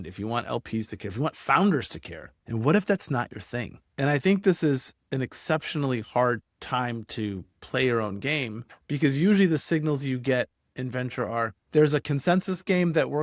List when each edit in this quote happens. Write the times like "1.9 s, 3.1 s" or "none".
none